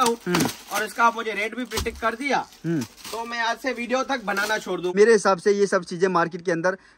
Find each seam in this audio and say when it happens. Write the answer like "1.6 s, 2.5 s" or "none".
4.9 s

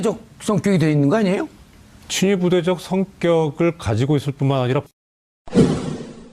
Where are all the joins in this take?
4.8 s

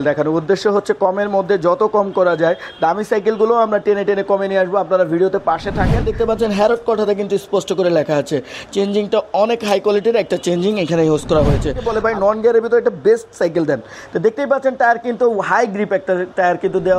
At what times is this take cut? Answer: 6.0 s, 11.9 s

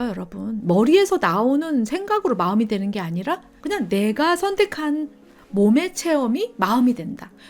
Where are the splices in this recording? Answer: 3.5 s

